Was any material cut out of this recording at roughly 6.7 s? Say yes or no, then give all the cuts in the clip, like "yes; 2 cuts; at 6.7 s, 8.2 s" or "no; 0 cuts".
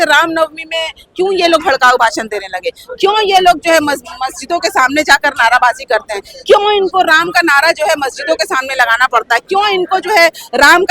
no; 0 cuts